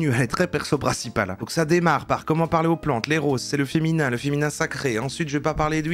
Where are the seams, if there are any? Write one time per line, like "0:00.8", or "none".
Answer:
0:01.4

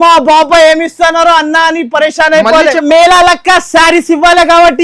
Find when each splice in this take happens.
0:02.8

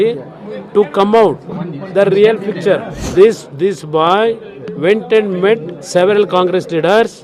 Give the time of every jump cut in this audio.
0:03.0

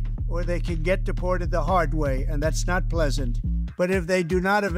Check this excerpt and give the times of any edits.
0:03.6

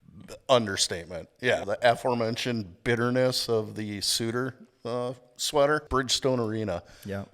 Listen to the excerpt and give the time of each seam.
0:01.6
0:05.9

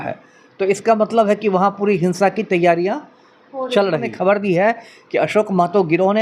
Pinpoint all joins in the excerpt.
0:04.1

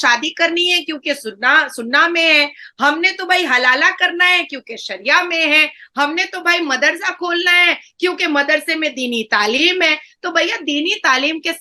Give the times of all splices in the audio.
none

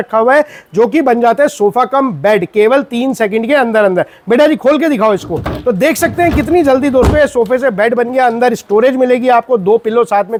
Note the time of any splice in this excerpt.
none

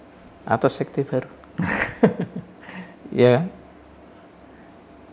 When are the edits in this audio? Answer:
none

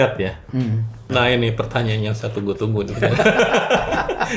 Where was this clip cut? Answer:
0:01.0

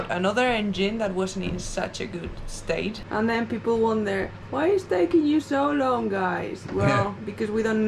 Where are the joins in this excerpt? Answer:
0:03.0

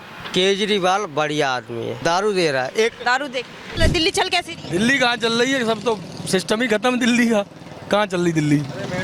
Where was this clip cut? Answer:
0:03.8

